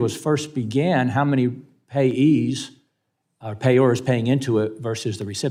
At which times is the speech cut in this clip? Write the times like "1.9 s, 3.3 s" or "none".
none